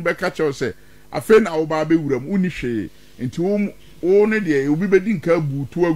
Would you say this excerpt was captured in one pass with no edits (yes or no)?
yes